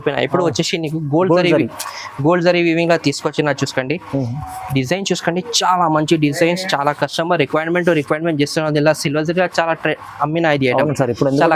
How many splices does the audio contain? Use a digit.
0